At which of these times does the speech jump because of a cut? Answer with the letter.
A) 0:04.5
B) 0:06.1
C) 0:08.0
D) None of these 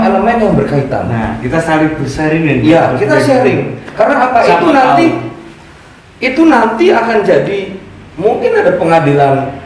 D